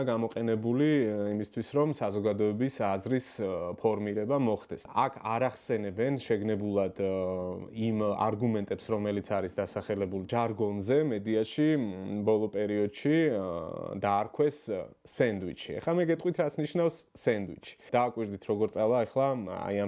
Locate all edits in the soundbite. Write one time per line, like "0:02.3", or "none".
0:04.8
0:10.3
0:17.8

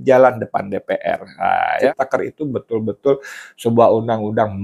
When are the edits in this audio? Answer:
0:01.9

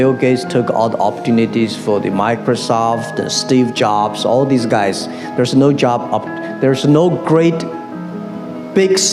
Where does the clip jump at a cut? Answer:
none

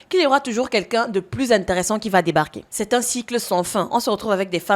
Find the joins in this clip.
0:02.7

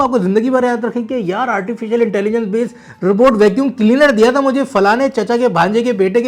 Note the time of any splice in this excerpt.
none

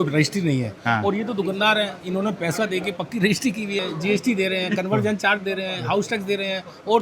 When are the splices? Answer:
0:03.8

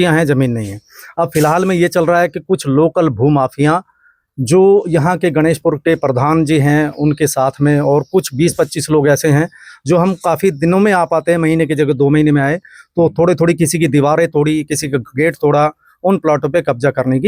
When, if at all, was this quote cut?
none

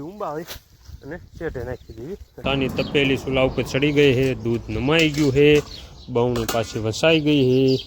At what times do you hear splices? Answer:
0:02.4

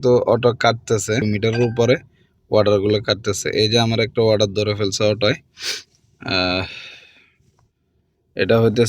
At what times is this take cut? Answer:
0:01.2

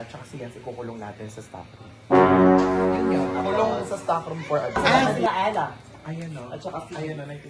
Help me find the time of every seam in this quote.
0:04.8

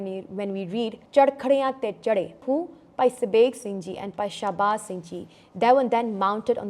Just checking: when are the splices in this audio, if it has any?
0:01.0
0:02.4

